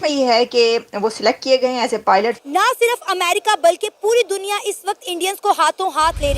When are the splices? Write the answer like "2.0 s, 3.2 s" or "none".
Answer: 2.4 s